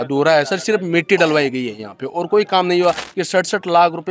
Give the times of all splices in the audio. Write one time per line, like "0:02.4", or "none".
0:03.1